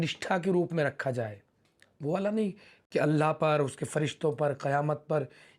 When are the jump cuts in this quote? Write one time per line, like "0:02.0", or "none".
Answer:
none